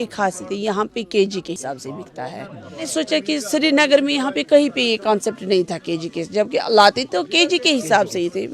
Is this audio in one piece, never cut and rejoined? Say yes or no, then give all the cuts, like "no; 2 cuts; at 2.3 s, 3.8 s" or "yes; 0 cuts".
no; 2 cuts; at 1.6 s, 2.9 s